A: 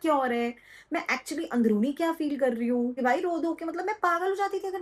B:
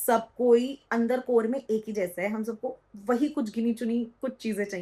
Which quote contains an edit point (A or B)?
A